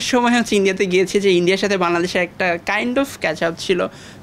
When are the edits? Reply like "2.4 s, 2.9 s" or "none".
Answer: none